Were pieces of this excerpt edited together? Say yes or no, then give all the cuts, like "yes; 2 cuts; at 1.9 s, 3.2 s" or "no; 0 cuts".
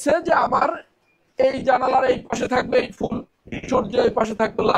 no; 0 cuts